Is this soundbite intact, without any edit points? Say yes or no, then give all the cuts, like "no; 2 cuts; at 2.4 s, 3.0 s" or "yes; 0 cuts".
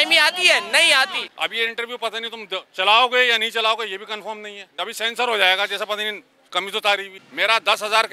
no; 3 cuts; at 1.2 s, 4.7 s, 7.2 s